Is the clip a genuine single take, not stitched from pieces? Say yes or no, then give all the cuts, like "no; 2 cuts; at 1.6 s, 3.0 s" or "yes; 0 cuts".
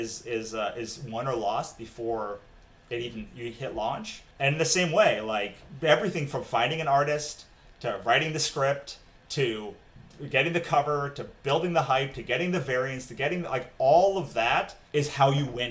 no; 3 cuts; at 4.2 s, 5.6 s, 14.8 s